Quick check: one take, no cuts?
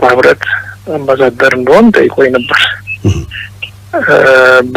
yes; 0 cuts

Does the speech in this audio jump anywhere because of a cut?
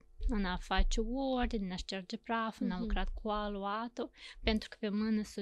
no; 0 cuts

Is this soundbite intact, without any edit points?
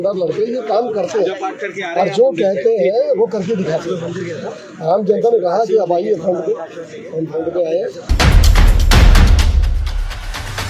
no; 1 cut; at 8.0 s

